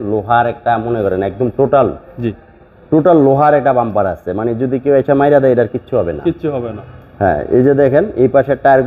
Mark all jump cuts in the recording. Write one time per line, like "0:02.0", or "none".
none